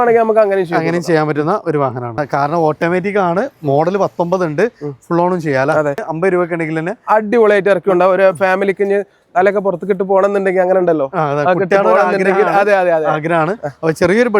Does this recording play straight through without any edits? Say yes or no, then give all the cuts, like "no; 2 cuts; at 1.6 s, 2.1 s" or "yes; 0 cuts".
no; 2 cuts; at 2.2 s, 6.1 s